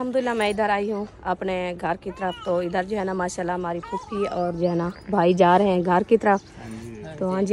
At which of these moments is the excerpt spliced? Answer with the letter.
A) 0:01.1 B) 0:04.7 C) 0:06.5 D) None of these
D